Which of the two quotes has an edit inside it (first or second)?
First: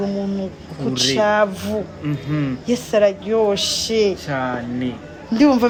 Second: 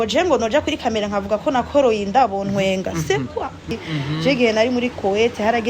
second